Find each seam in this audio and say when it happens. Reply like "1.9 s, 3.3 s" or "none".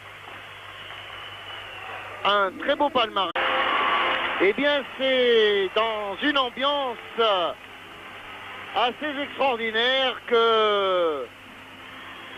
none